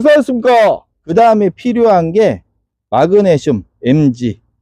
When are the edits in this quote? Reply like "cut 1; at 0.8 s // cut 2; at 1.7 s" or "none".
cut 1; at 0.9 s